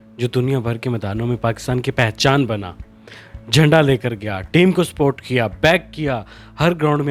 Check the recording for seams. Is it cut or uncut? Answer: uncut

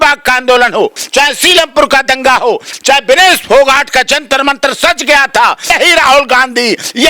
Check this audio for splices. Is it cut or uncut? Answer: cut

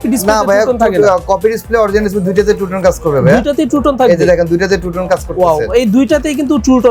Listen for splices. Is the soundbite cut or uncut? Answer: uncut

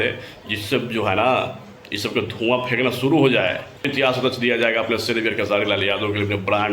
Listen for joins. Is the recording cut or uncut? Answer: cut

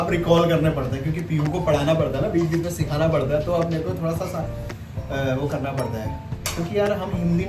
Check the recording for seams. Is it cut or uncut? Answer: uncut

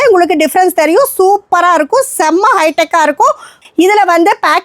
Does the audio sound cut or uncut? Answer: cut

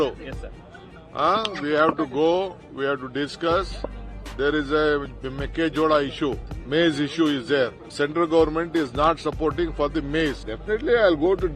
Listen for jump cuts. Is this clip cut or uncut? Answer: cut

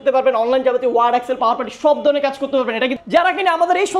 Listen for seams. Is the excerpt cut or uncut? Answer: cut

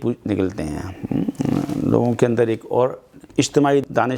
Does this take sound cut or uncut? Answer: cut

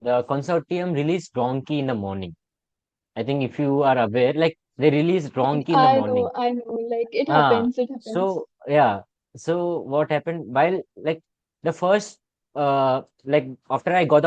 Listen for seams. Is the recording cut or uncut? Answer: uncut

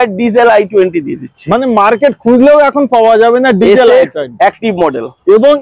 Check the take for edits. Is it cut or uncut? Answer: uncut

